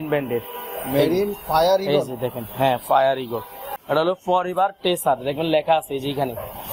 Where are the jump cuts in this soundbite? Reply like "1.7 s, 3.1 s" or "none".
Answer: 3.7 s